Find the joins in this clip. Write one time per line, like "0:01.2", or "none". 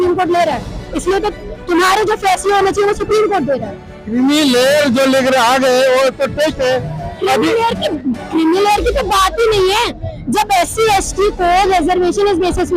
none